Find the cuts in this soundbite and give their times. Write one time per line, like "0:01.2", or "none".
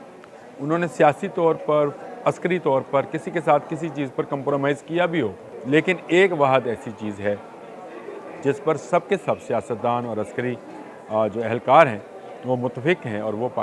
0:05.5

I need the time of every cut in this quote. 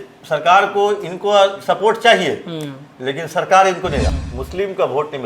0:04.1

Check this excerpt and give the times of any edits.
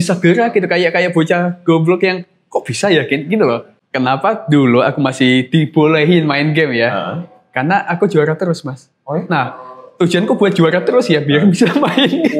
0:03.7

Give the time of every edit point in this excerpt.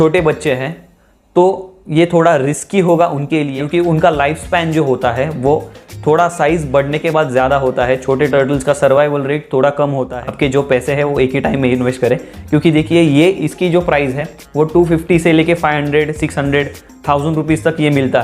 0:03.6
0:10.1

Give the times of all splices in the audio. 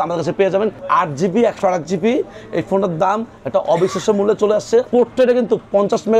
0:00.8
0:04.9

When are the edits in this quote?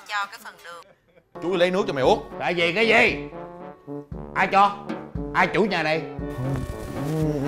0:01.3

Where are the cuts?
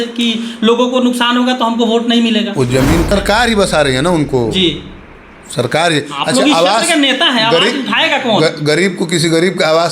0:03.1

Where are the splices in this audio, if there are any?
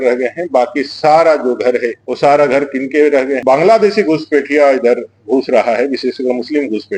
0:02.0
0:03.4

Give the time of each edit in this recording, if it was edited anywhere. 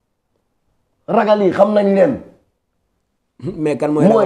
none

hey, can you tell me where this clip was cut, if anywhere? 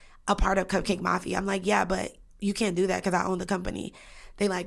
none

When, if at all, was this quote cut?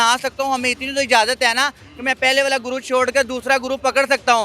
none

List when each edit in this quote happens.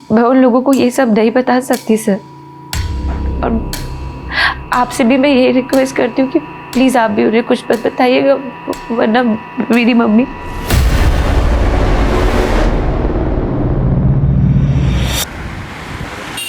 0:15.5

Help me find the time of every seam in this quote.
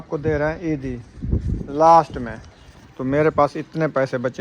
0:01.4

